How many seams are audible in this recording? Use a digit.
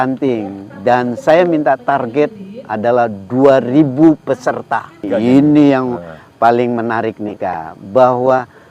1